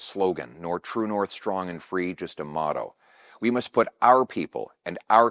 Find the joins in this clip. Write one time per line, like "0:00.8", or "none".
none

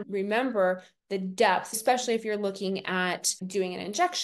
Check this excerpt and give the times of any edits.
0:01.8
0:03.3

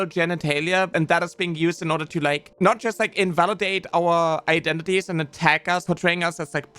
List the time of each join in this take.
0:00.9
0:05.8

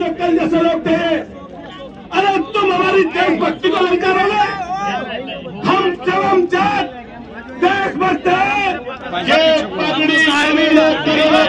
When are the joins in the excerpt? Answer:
0:09.1

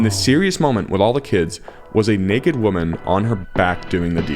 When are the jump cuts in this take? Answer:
0:03.5

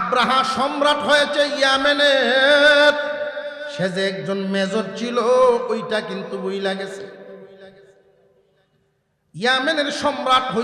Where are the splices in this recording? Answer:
0:03.6

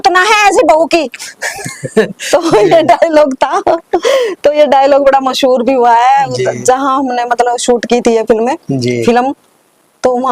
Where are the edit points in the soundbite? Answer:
none

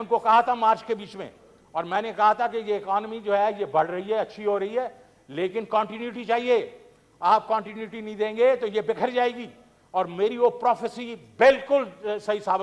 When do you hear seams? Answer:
none

